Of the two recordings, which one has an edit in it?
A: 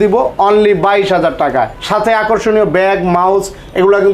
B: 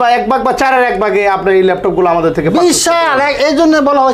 A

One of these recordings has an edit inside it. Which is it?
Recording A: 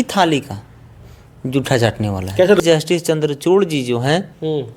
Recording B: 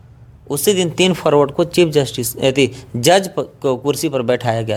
A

